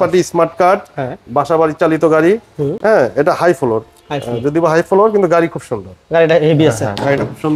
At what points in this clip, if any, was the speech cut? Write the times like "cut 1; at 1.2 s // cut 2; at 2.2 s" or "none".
none